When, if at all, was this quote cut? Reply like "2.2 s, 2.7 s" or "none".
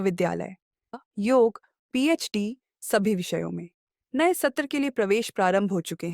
0.9 s